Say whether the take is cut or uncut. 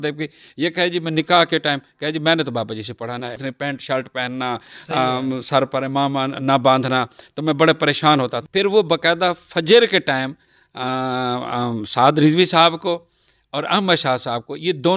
cut